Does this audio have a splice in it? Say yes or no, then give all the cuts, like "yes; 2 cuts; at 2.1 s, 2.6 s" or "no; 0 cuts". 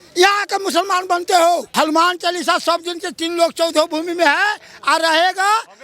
yes; 1 cut; at 1.7 s